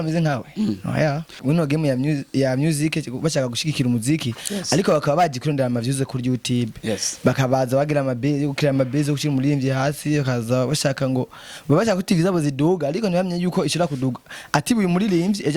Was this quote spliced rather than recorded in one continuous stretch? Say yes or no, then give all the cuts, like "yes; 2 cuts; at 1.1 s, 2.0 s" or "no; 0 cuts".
yes; 1 cut; at 1.3 s